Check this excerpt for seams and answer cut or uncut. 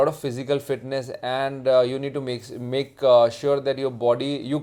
uncut